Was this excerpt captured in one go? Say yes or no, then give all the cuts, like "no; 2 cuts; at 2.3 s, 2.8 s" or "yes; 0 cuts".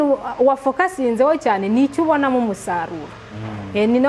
yes; 0 cuts